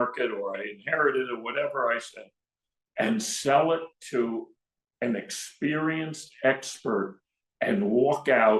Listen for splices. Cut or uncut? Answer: uncut